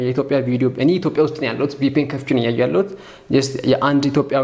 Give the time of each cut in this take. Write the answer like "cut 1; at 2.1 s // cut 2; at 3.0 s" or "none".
none